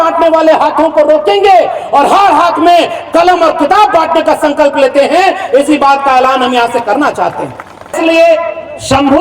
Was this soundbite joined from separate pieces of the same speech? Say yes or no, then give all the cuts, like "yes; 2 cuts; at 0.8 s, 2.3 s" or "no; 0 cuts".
yes; 1 cut; at 7.9 s